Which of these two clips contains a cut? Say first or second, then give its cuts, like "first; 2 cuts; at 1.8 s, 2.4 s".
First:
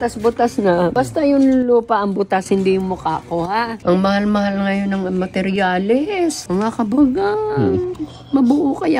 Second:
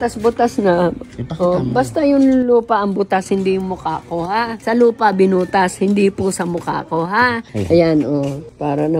first; 3 cuts; at 0.9 s, 3.7 s, 6.4 s